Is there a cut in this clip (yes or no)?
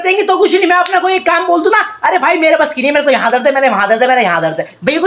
no